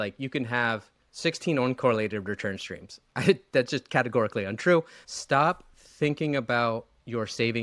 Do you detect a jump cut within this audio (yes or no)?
yes